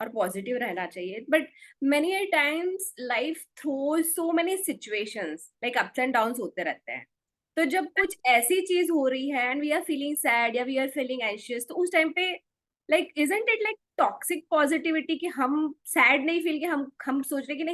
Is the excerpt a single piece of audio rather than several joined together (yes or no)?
yes